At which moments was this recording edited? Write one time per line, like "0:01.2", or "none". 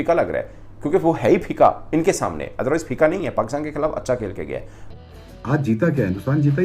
0:04.8